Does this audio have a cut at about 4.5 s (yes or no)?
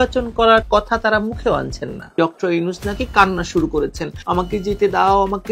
no